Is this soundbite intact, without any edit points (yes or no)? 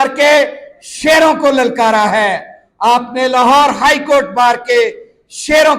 yes